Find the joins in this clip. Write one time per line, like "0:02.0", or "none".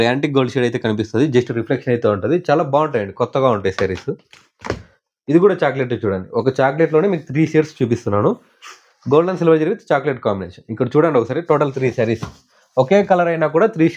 0:01.0